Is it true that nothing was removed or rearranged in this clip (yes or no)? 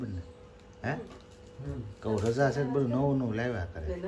yes